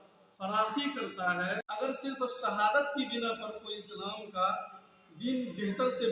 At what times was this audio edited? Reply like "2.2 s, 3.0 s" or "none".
1.6 s